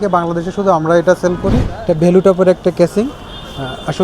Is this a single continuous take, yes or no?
no